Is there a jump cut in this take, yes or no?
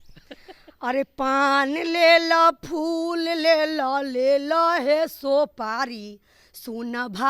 no